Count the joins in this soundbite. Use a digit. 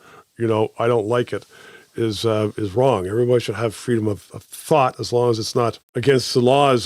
1